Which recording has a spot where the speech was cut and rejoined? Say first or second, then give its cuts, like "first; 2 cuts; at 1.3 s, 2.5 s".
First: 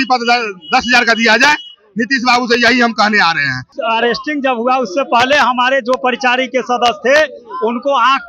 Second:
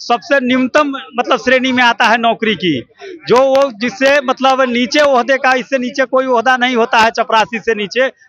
first; 1 cut; at 3.7 s